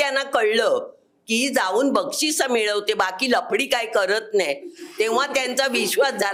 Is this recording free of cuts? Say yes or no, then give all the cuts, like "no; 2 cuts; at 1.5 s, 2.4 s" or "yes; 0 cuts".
yes; 0 cuts